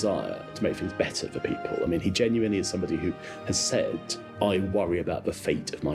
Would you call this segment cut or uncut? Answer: uncut